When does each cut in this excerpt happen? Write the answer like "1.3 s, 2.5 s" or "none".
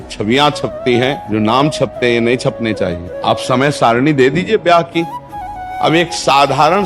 1.2 s, 3.1 s, 5.6 s